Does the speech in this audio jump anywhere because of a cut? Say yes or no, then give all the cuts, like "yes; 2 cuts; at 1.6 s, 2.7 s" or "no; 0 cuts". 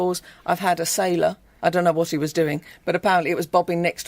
yes; 1 cut; at 1.5 s